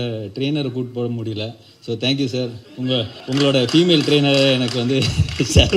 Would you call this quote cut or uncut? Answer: cut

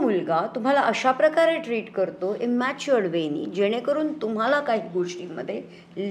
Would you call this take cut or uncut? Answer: uncut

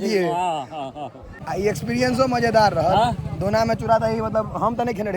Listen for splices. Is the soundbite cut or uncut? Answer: cut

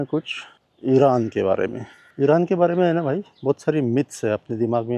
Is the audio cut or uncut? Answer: uncut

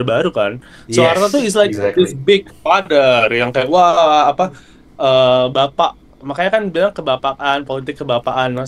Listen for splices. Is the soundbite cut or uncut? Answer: uncut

